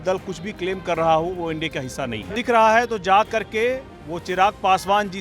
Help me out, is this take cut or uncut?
cut